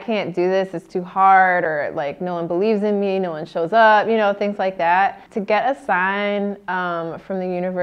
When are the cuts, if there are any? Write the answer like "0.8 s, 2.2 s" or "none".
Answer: 5.3 s